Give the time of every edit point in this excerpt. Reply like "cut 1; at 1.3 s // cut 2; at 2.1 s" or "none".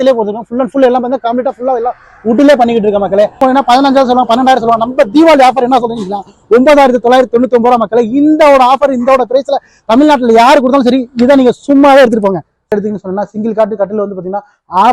cut 1; at 3.4 s // cut 2; at 12.7 s